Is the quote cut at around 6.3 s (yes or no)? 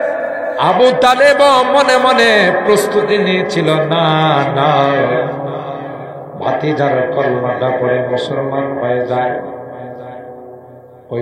no